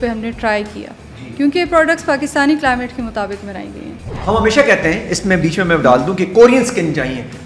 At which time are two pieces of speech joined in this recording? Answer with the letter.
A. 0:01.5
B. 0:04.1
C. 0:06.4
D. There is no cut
B